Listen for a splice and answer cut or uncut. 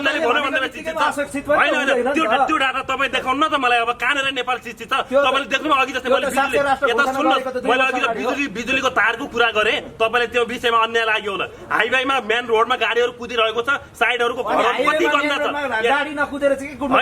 uncut